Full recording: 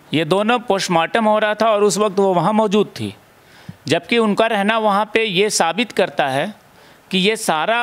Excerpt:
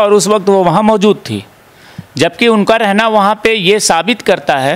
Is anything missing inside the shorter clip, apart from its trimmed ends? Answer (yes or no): no